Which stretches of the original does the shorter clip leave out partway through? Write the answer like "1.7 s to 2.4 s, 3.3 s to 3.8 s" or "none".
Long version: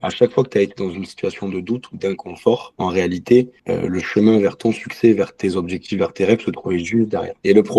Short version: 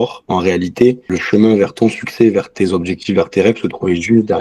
3.6 s to 3.9 s